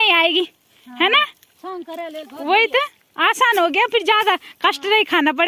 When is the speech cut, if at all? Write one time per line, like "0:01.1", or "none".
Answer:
none